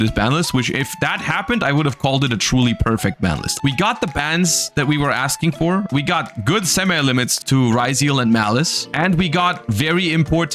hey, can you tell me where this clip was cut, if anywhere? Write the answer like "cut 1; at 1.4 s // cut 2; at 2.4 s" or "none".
cut 1; at 3.5 s // cut 2; at 5.9 s

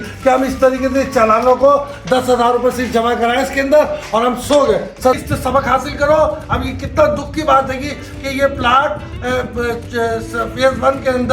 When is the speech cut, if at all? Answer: cut 1; at 5.2 s

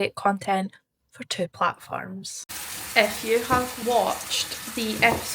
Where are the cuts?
cut 1; at 2.4 s // cut 2; at 3.7 s

